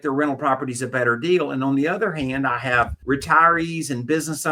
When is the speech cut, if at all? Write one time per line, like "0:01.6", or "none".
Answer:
0:03.0